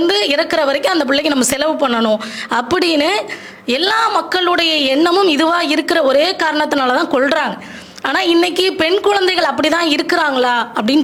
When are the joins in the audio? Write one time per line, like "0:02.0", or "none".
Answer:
none